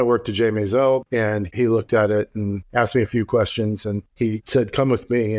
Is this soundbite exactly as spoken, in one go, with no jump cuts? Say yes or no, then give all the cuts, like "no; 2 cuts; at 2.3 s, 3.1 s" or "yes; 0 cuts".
no; 3 cuts; at 1.0 s, 2.6 s, 4.0 s